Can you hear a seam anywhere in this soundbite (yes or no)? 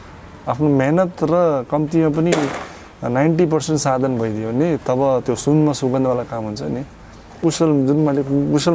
yes